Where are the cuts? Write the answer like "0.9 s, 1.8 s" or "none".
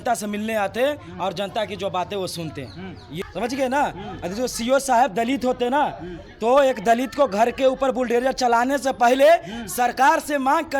3.1 s